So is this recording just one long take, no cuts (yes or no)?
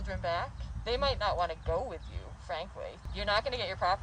no